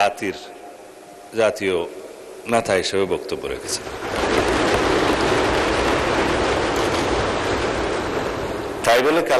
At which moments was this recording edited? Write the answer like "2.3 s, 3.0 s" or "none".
none